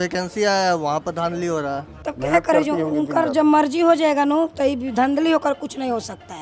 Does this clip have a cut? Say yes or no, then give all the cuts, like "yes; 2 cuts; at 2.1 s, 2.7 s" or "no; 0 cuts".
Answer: yes; 1 cut; at 2.1 s